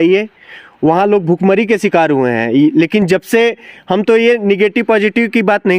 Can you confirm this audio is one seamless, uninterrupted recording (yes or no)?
yes